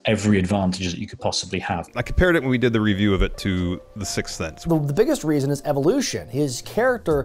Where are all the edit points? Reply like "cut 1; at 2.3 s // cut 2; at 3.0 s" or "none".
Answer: cut 1; at 1.8 s // cut 2; at 4.7 s